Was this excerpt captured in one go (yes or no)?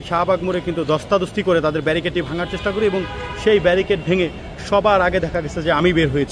yes